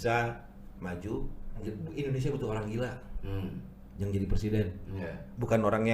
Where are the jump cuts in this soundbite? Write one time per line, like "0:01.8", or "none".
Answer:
0:01.6